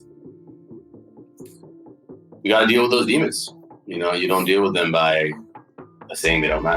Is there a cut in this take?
yes; 1 cut; at 5.5 s

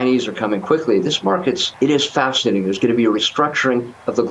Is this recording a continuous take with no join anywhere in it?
no; 1 cut; at 1.7 s

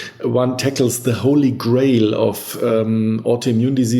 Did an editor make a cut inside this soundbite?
no; 0 cuts

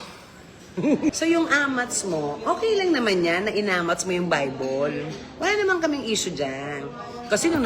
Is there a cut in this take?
yes; 1 cut; at 1.1 s

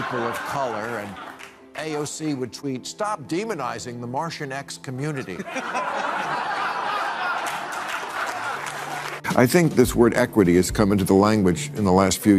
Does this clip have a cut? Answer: yes; 1 cut; at 9.2 s

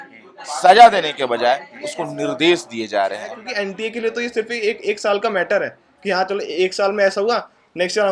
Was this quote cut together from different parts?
yes; 1 cut; at 3.4 s

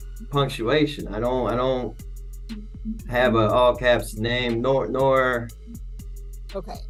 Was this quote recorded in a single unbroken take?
yes; 0 cuts

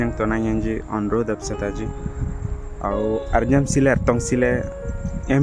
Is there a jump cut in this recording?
no; 0 cuts

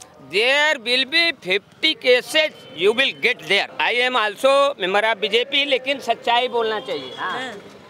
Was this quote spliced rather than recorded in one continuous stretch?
yes; 1 cut; at 3.7 s

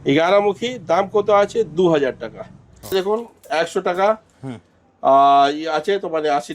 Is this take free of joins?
no; 1 cut; at 2.9 s

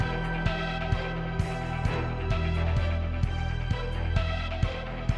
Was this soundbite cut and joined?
no; 0 cuts

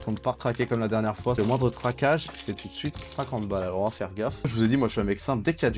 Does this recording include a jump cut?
yes; 2 cuts; at 1.4 s, 4.5 s

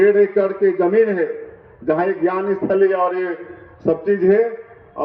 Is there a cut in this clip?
no; 0 cuts

